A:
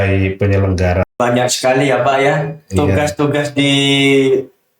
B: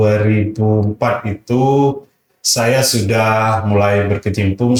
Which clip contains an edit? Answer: A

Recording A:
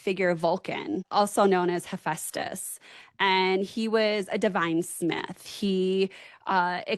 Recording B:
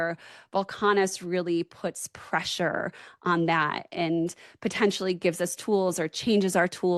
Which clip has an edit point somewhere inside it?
A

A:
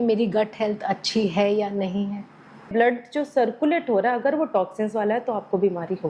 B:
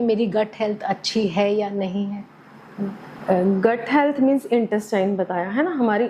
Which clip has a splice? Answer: A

